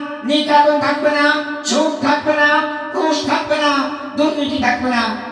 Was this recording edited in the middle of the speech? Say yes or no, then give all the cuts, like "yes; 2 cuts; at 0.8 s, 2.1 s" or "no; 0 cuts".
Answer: no; 0 cuts